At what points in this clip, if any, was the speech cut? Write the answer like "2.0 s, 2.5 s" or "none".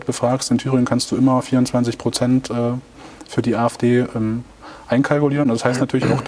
none